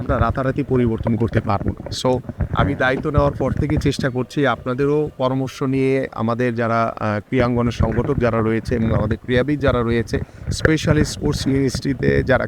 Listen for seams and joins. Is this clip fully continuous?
yes; 0 cuts

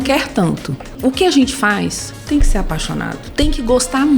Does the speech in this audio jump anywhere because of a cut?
yes; 2 cuts; at 0.9 s, 3.2 s

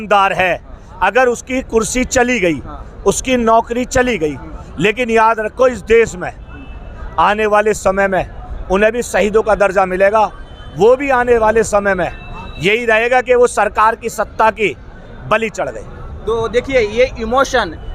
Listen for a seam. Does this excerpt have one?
no; 0 cuts

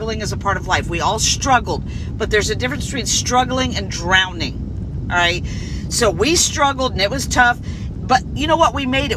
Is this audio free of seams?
yes; 0 cuts

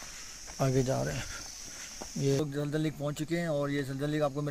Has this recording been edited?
yes; 1 cut; at 2.4 s

